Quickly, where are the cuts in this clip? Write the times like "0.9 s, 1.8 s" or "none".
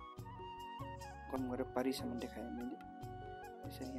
1.2 s